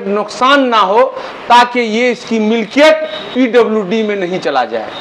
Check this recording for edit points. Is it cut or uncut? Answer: uncut